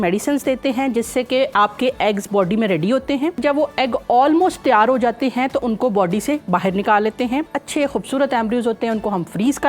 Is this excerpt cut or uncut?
cut